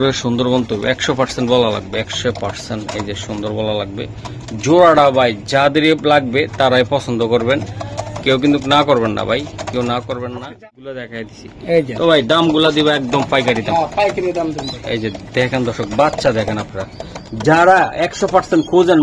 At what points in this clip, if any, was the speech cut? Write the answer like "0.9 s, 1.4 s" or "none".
10.4 s